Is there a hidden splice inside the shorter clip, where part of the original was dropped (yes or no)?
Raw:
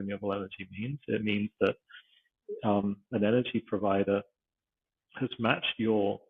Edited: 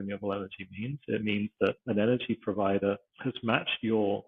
yes